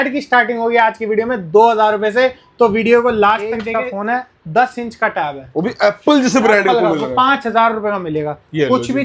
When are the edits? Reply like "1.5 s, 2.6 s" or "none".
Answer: 3.7 s